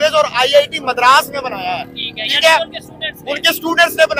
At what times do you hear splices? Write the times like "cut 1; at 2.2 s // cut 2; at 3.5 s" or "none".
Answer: none